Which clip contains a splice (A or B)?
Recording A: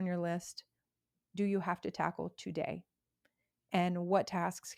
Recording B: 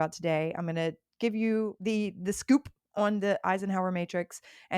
B